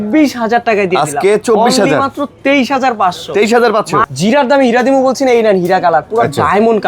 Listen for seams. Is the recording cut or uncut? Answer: cut